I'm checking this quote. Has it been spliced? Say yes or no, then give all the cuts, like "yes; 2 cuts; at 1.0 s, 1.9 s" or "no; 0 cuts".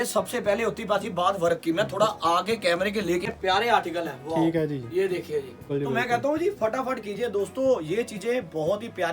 yes; 2 cuts; at 3.2 s, 5.7 s